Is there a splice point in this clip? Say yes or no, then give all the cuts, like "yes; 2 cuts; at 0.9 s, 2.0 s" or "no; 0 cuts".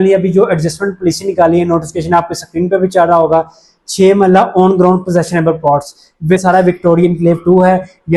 yes; 1 cut; at 6.4 s